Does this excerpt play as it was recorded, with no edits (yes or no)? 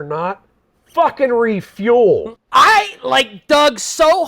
no